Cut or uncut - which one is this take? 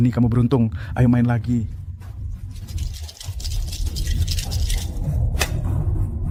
uncut